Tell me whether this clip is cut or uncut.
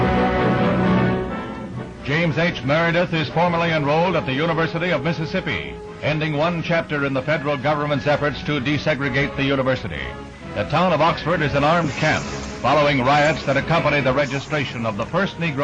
uncut